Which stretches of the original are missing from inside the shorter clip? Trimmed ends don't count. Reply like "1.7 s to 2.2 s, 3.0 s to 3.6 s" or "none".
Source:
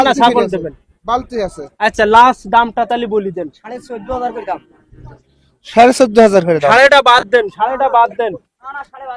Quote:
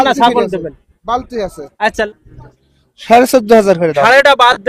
2.1 s to 4.7 s